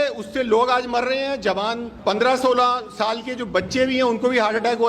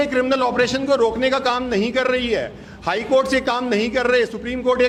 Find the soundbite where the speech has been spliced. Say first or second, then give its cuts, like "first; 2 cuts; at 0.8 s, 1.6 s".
first; 1 cut; at 1.9 s